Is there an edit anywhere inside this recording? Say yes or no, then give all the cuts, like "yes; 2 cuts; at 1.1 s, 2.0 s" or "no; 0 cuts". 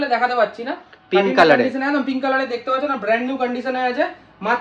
no; 0 cuts